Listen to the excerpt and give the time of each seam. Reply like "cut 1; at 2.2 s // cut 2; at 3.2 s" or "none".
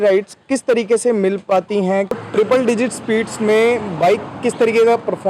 cut 1; at 2.2 s